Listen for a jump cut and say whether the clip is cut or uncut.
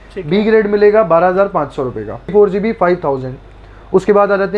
cut